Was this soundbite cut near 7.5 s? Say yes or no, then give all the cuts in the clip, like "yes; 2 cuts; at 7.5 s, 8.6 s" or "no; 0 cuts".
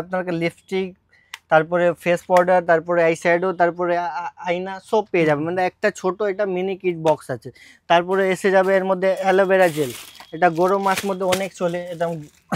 no; 0 cuts